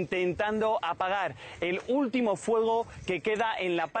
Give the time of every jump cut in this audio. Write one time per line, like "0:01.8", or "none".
0:02.4